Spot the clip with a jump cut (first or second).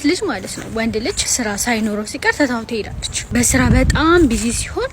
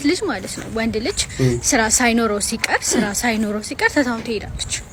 first